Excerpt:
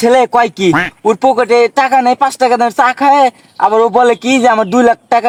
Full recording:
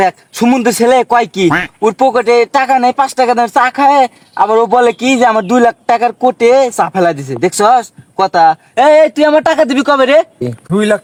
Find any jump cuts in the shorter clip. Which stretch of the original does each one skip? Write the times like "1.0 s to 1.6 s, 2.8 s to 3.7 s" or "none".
none